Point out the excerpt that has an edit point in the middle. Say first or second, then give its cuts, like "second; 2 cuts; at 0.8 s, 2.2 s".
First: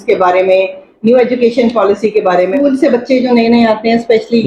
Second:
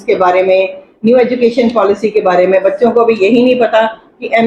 first; 1 cut; at 2.5 s